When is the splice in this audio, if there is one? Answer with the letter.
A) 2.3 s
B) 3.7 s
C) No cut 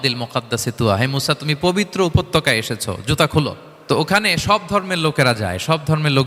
B